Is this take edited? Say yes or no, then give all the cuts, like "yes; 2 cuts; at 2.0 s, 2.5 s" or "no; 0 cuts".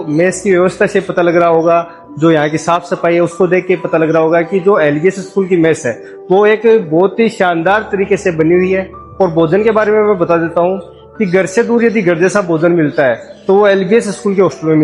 no; 0 cuts